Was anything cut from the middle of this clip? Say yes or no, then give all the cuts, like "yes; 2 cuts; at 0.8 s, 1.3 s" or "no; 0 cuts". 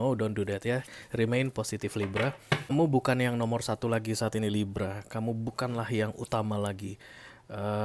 yes; 1 cut; at 2.7 s